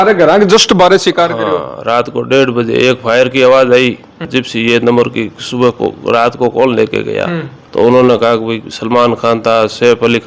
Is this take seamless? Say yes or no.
no